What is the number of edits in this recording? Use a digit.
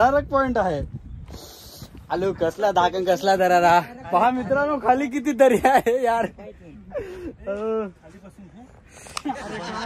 0